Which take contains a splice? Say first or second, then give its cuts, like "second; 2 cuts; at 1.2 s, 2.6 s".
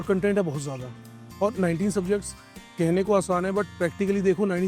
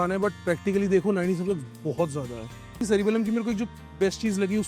second; 1 cut; at 2.8 s